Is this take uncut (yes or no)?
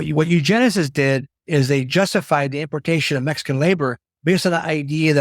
no